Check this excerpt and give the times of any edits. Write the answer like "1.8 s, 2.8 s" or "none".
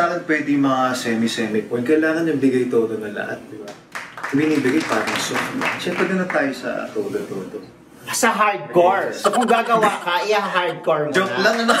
none